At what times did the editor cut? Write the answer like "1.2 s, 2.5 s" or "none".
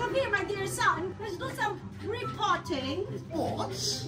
1.1 s